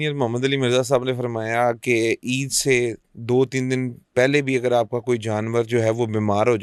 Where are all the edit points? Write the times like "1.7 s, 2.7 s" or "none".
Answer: none